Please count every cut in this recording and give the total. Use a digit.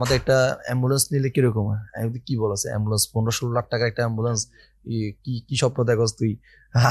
0